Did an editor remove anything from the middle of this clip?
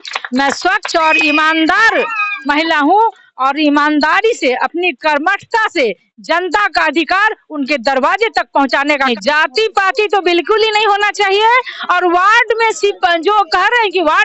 yes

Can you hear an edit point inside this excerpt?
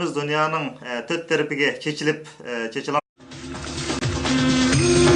no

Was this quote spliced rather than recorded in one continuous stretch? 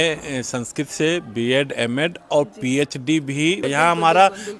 yes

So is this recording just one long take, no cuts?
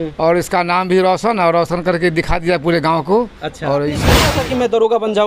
no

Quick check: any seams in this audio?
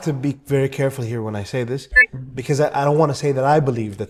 no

